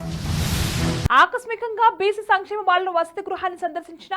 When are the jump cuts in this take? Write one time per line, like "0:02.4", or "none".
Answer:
0:01.1